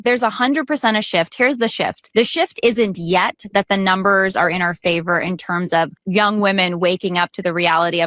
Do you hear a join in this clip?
yes; 2 cuts; at 2.0 s, 6.0 s

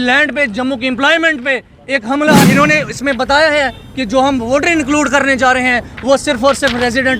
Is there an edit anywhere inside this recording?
yes; 1 cut; at 2.5 s

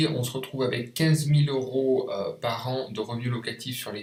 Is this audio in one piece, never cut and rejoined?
yes; 0 cuts

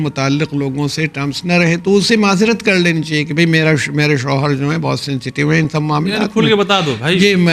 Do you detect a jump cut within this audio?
no; 0 cuts

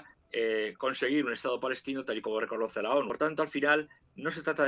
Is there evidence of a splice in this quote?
yes; 1 cut; at 3.1 s

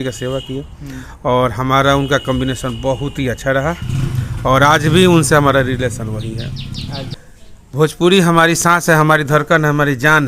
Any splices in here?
yes; 1 cut; at 7.1 s

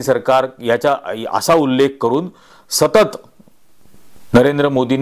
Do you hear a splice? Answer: no; 0 cuts

